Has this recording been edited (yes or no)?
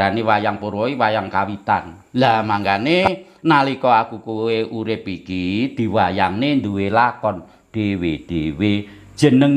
yes